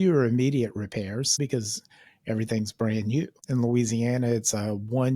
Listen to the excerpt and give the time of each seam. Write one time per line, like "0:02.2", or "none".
0:01.4
0:03.4